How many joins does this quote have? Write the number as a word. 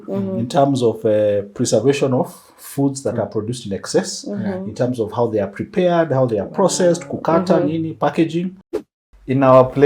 one